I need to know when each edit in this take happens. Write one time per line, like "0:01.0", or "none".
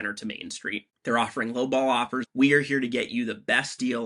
0:00.9
0:02.2